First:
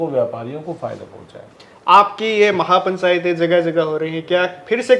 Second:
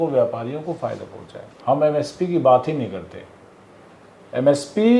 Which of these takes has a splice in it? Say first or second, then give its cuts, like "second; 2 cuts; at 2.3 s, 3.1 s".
second; 1 cut; at 1.5 s